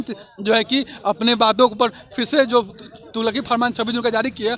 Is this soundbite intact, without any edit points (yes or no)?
yes